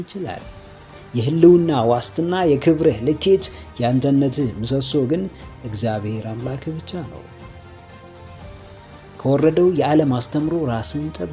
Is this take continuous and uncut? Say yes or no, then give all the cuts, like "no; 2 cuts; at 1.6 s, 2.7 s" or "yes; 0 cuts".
yes; 0 cuts